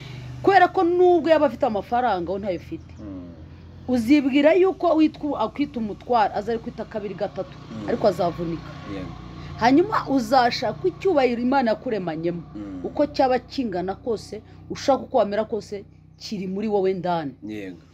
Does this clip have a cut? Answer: no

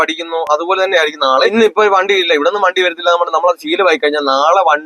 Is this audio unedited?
no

